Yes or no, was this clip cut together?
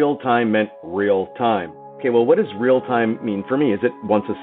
yes